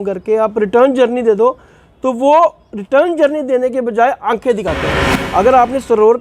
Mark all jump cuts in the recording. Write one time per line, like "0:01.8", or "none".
0:05.2

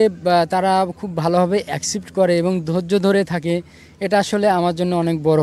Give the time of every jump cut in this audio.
none

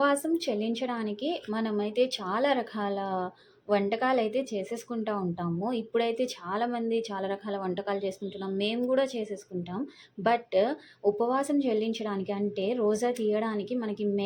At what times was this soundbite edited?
none

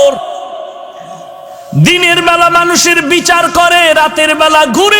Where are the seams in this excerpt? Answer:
none

